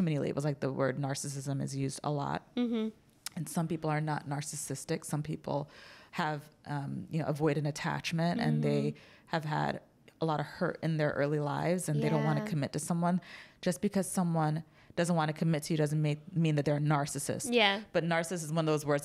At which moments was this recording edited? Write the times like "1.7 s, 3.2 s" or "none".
none